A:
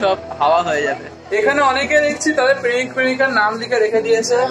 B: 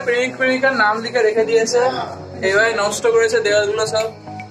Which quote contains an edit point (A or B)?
A